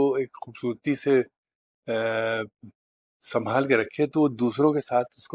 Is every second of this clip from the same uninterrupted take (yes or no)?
yes